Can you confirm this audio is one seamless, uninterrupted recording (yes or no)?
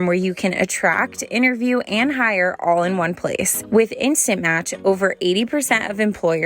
no